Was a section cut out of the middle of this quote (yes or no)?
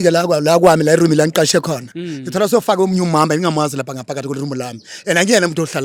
no